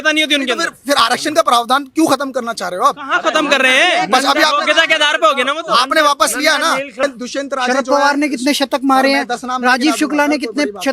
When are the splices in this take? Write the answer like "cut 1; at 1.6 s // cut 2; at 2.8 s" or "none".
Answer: cut 1; at 7.0 s